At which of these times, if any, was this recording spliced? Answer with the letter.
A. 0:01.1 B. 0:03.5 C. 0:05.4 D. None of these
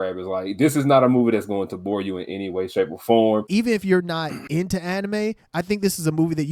B